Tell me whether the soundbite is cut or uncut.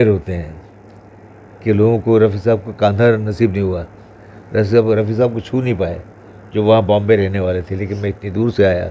uncut